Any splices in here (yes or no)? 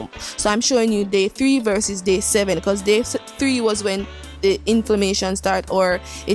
no